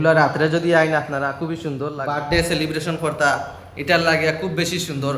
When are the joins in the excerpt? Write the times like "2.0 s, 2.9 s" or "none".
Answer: 2.0 s